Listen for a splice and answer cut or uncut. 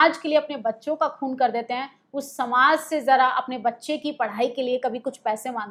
uncut